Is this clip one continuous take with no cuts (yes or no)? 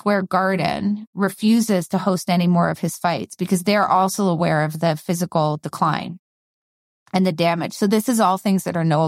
yes